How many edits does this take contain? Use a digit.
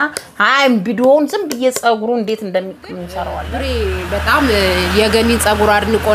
1